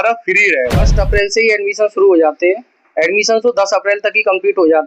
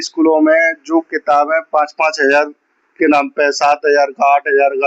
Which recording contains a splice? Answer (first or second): first